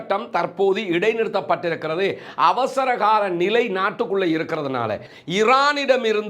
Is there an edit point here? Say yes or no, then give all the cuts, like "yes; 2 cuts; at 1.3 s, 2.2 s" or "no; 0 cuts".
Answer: yes; 1 cut; at 5.1 s